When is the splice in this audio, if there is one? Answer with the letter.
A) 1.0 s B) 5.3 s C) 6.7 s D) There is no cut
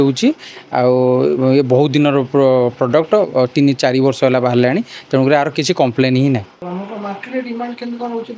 C